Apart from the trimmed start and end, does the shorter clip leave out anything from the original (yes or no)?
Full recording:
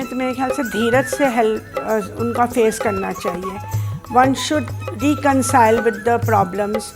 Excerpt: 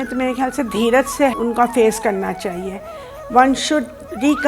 yes